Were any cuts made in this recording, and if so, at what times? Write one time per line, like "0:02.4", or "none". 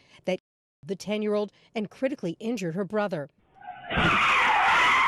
0:03.7